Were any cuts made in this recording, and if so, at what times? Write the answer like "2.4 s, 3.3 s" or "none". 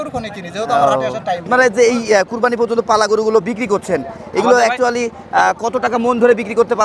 1.5 s

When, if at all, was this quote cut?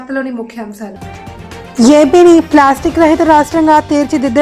1.0 s

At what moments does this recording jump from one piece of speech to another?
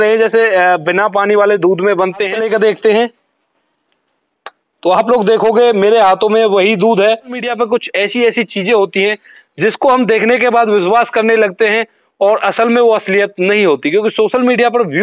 2.4 s, 7.5 s

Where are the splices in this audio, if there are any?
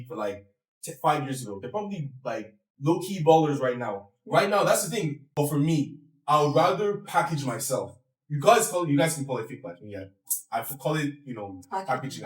5.2 s

